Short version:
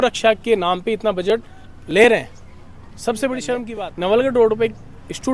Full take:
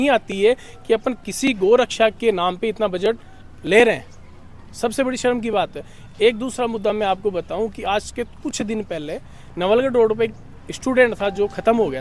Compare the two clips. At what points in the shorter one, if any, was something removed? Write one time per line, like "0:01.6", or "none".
0:03.8